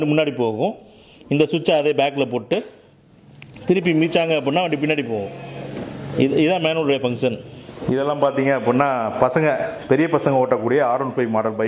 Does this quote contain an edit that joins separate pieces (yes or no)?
yes